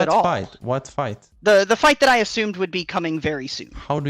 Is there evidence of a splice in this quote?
yes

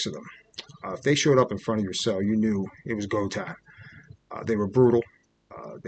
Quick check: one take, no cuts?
yes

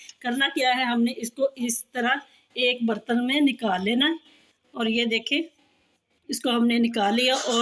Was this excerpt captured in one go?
yes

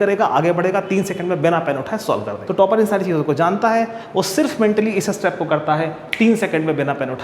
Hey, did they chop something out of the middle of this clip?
yes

